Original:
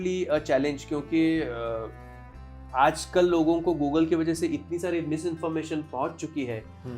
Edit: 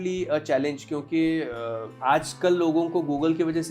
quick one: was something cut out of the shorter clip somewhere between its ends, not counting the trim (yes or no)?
yes